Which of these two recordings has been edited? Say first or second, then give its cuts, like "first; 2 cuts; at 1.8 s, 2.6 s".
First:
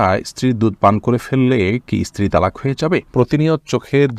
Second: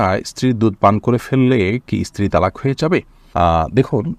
first; 1 cut; at 3.1 s